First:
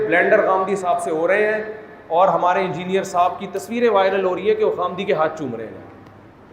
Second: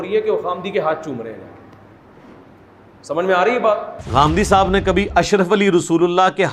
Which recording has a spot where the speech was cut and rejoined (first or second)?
second